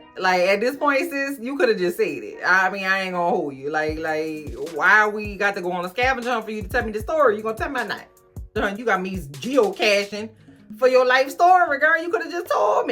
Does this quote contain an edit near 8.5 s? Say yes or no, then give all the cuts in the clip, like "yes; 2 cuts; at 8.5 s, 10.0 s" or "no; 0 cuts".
yes; 1 cut; at 8.5 s